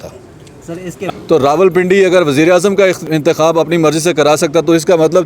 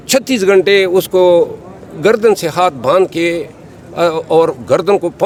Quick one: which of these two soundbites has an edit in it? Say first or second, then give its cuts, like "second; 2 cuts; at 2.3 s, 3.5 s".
first; 2 cuts; at 1.1 s, 3.1 s